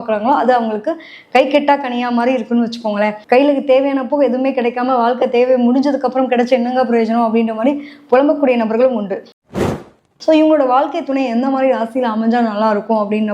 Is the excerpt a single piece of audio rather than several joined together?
no; 1 cut; at 9.5 s

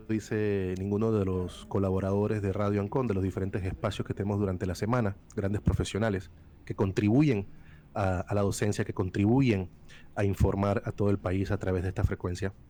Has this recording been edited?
no; 0 cuts

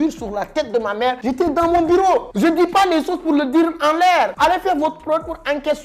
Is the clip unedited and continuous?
yes; 0 cuts

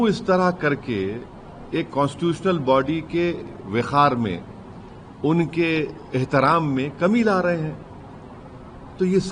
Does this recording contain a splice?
no; 0 cuts

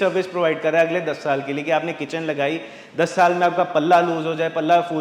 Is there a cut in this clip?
no; 0 cuts

